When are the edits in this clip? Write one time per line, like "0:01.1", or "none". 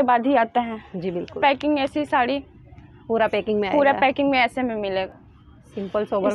0:01.4
0:05.2